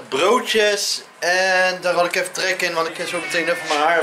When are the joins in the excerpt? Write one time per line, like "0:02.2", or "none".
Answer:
0:03.0